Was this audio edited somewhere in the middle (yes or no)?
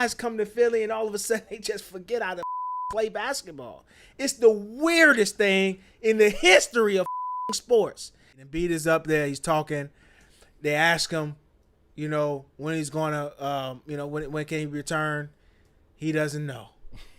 yes